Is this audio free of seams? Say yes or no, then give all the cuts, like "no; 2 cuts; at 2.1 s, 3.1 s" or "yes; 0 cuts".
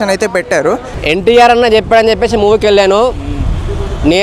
no; 1 cut; at 0.9 s